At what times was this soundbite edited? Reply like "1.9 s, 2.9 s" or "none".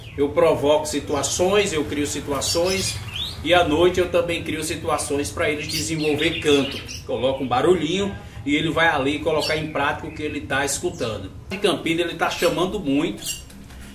11.6 s